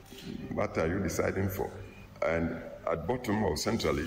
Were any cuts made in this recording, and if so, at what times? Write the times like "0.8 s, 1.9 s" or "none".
none